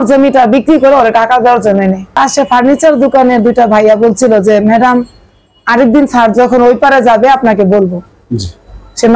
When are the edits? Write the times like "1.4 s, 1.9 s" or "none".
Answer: 2.2 s